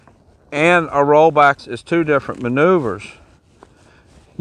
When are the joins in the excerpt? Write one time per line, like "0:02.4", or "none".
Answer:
0:01.6